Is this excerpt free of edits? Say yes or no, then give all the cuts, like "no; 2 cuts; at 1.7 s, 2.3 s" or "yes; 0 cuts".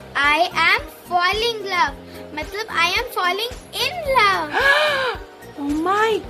yes; 0 cuts